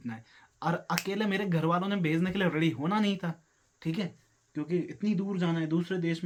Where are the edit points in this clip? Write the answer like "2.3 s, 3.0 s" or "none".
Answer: none